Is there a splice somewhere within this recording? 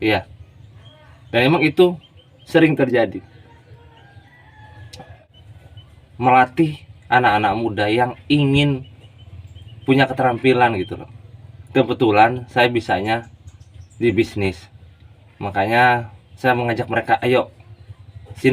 yes; 1 cut; at 5.3 s

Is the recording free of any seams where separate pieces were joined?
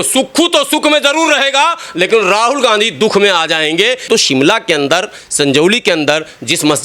no; 1 cut; at 4.1 s

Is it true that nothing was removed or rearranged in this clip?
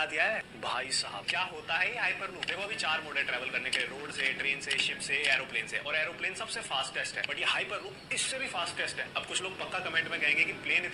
yes; 0 cuts

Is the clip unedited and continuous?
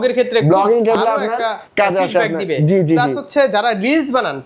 no; 1 cut; at 1.6 s

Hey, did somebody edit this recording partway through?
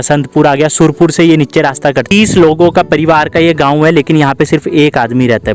yes; 1 cut; at 2.1 s

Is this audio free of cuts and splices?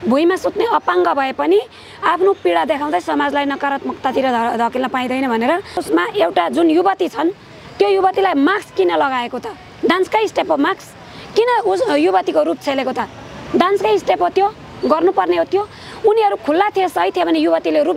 no; 1 cut; at 5.8 s

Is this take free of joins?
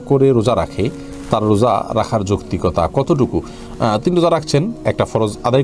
yes; 0 cuts

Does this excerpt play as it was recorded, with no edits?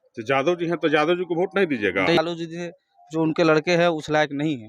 no; 1 cut; at 2.2 s

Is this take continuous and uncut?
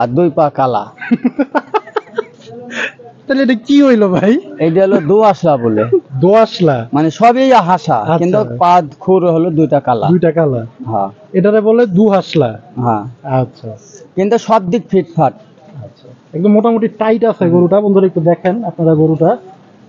yes; 0 cuts

